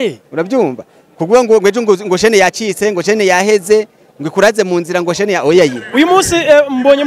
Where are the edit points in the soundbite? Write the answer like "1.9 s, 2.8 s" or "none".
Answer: 5.8 s